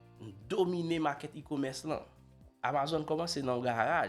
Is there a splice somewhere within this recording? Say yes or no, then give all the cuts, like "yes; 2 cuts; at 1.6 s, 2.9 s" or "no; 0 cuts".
yes; 1 cut; at 2.5 s